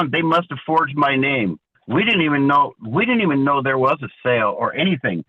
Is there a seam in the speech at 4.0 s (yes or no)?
no